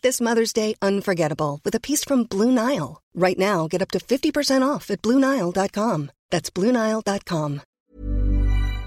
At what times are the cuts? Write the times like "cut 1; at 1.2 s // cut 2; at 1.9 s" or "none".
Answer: cut 1; at 7.7 s

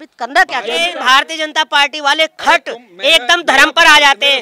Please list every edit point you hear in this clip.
cut 1; at 0.9 s

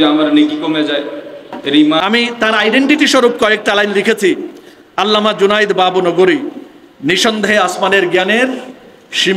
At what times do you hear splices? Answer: cut 1; at 2.0 s

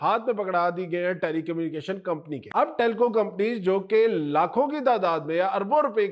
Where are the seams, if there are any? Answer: cut 1; at 2.4 s

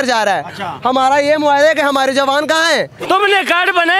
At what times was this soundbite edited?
cut 1; at 2.9 s

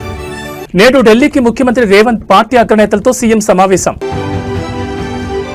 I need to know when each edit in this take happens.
none

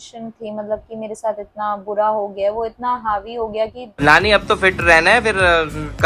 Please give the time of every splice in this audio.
cut 1; at 3.9 s

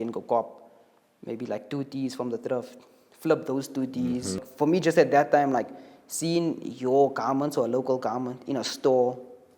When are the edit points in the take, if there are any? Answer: cut 1; at 4.5 s

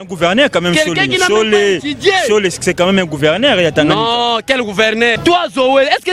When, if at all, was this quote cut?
cut 1; at 5.2 s

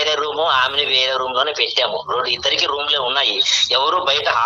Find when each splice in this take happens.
none

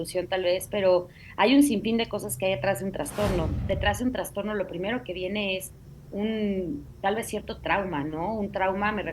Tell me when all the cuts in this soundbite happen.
cut 1; at 3.6 s

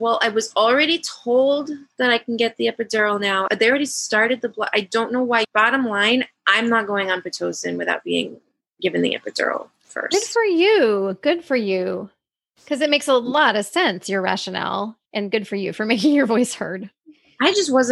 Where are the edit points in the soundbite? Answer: none

